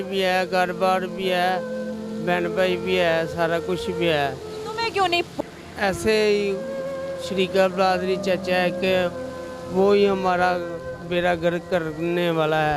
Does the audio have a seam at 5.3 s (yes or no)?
yes